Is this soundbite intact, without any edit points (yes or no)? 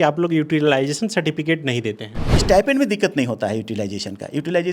no